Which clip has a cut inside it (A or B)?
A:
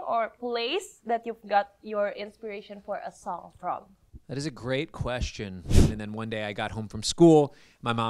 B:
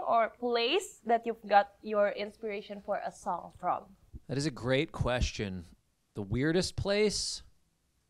A